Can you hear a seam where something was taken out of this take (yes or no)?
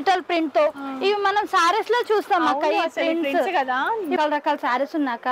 yes